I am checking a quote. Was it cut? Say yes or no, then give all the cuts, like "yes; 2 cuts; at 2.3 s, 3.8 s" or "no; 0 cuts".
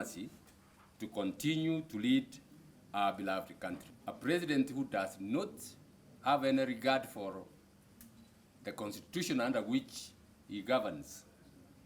yes; 1 cut; at 3.9 s